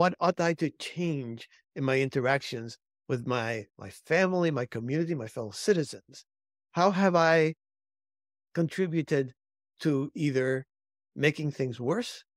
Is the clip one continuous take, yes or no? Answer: yes